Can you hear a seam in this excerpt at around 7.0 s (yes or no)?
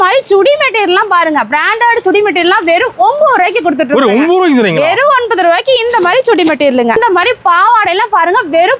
yes